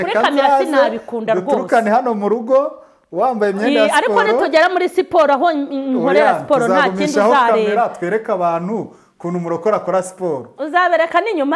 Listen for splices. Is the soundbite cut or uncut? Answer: uncut